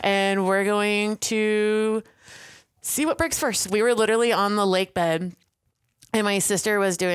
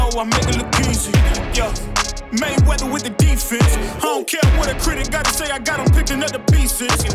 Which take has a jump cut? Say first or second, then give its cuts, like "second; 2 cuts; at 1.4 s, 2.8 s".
first; 1 cut; at 3.6 s